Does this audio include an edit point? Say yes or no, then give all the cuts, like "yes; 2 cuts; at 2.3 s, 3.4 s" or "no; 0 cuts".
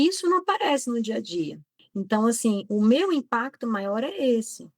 yes; 1 cut; at 1.8 s